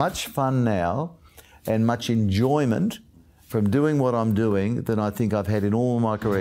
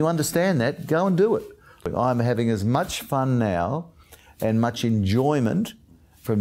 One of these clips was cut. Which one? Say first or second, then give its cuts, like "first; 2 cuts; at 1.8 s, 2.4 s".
second; 1 cut; at 1.8 s